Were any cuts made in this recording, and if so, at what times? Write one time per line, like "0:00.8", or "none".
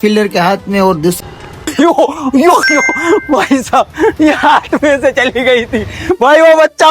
0:01.2